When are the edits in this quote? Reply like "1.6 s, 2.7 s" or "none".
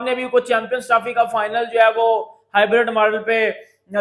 none